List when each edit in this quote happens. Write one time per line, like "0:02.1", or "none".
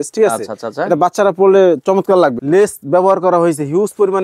0:02.4

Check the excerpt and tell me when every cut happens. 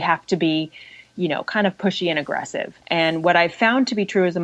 0:02.8

